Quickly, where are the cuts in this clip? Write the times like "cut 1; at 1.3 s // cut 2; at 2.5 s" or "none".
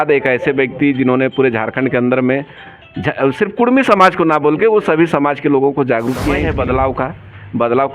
cut 1; at 6.5 s